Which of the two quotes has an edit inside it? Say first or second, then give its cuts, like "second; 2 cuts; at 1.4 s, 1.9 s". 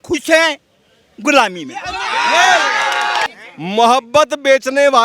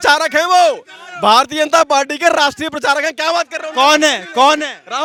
first; 1 cut; at 3.3 s